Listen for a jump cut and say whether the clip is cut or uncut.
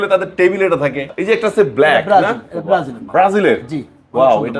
cut